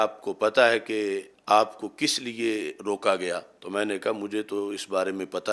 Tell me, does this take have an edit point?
yes; 2 cuts; at 1.3 s, 3.5 s

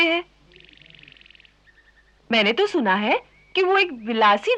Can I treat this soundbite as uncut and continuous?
no; 1 cut; at 2.2 s

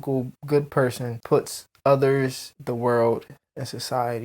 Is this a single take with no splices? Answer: no; 1 cut; at 1.1 s

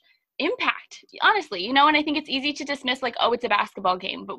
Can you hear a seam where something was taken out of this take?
yes; 1 cut; at 1.1 s

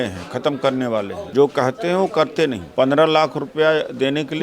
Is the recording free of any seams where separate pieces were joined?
no; 2 cuts; at 1.2 s, 2.6 s

